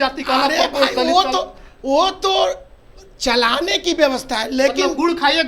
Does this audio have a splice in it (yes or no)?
no